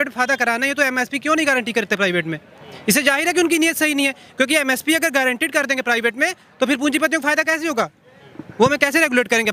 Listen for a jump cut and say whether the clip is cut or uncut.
uncut